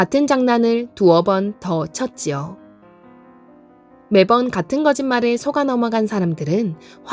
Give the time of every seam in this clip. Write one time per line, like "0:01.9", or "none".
none